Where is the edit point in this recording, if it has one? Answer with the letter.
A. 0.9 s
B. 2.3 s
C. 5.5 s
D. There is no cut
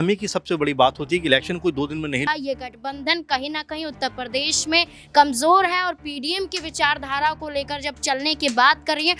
B